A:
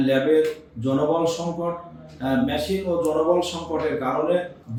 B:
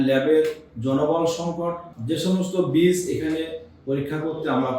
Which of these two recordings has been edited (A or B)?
B